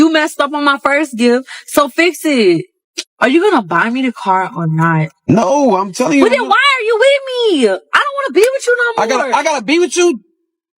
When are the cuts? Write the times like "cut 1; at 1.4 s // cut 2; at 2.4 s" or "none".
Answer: none